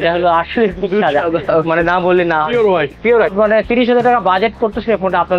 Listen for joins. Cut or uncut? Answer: cut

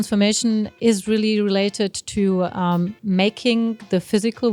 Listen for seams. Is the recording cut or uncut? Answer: uncut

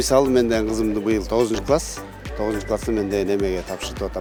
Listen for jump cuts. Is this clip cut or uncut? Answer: uncut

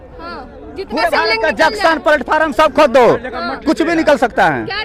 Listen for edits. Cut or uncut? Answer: uncut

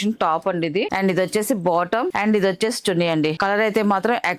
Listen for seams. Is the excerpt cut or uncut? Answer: cut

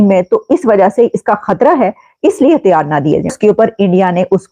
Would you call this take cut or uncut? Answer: cut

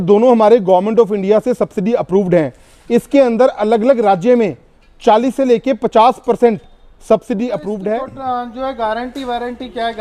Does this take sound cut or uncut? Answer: cut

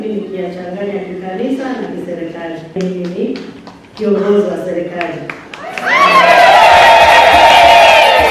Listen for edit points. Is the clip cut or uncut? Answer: cut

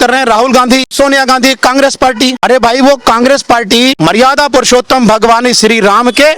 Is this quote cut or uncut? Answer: cut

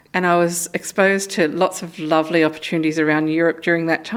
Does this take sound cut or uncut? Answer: uncut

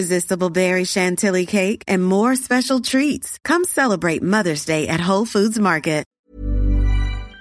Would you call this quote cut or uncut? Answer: cut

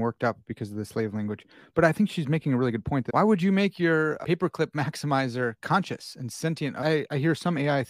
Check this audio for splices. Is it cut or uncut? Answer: cut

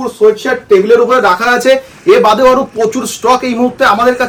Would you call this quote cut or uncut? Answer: uncut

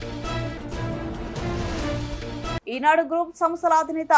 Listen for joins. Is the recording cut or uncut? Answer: uncut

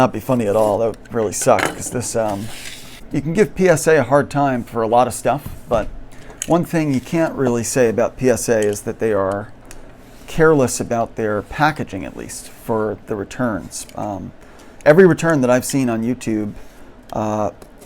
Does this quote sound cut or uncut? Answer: cut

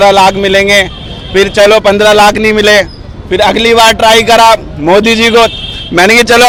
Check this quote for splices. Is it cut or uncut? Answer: uncut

